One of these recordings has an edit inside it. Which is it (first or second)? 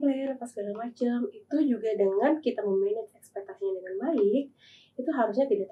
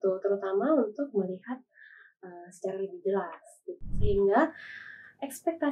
second